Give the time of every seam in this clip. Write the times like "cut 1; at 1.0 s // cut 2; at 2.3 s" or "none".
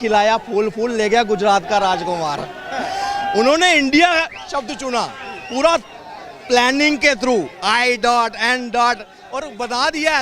none